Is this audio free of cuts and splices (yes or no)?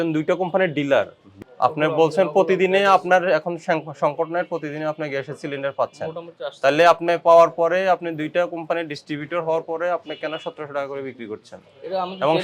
no